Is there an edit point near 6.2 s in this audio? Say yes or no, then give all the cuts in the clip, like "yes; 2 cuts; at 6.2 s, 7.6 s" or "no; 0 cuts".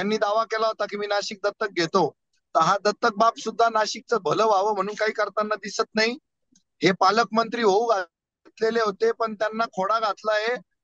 no; 0 cuts